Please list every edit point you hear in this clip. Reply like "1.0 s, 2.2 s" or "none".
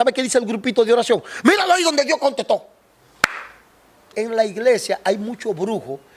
4.1 s